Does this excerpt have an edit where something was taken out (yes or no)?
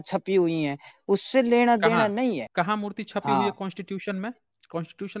yes